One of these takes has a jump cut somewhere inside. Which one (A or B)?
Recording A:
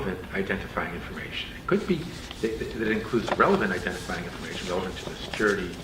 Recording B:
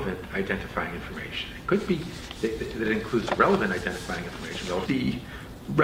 A